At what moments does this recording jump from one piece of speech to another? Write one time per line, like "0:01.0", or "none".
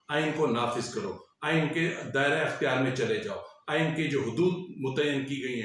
none

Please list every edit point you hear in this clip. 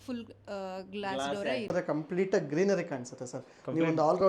0:01.7

